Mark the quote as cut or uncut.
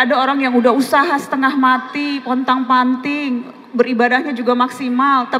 uncut